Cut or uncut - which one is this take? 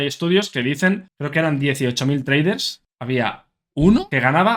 cut